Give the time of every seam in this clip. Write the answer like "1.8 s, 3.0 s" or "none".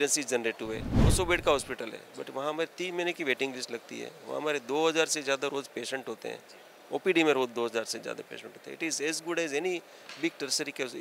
0.9 s